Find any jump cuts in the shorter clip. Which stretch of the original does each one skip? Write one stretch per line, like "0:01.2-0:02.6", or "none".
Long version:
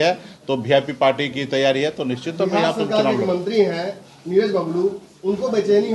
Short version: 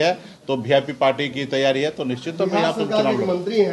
none

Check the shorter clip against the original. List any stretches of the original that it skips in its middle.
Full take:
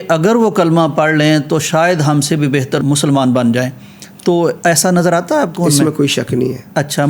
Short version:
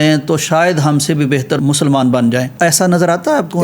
0:03.8-0:04.6

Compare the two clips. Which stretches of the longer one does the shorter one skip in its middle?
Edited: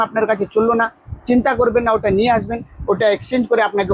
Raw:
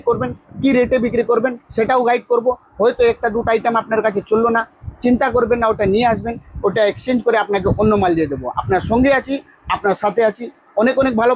none

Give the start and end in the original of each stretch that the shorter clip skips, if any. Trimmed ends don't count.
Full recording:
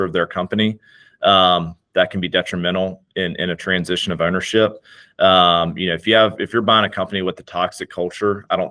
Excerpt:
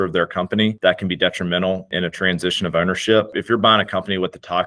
0:00.8-0:01.9
0:03.0-0:03.4
0:04.8-0:06.4

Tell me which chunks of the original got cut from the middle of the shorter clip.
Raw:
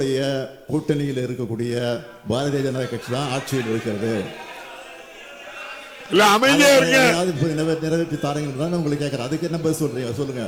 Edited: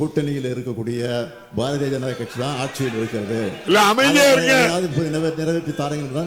0:04.3-0:06.0

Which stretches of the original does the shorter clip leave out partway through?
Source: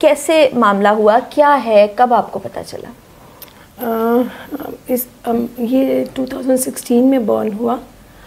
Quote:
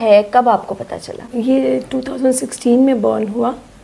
0:02.9-0:05.5

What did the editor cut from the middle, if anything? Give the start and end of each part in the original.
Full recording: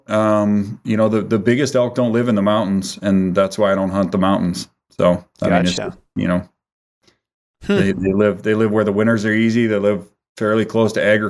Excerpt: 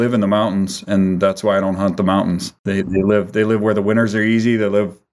0:04.9-0:07.8

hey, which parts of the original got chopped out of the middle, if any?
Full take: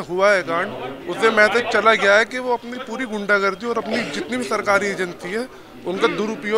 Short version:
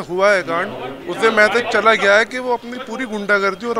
none

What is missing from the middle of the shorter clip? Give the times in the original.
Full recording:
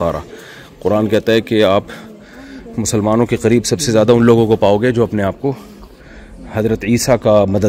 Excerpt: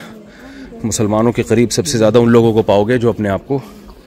none

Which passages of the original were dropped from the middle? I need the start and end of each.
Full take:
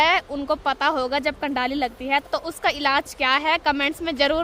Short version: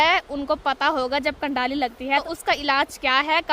0:02.3-0:02.4

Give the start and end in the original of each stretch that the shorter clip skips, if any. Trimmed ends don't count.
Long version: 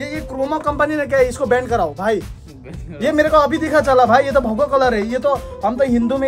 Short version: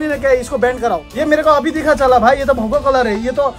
0:01.9-0:02.9

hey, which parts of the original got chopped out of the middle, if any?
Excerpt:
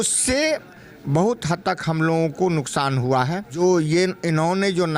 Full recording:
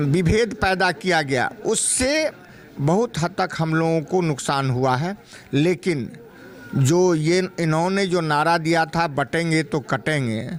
0:05.3-0:06.9

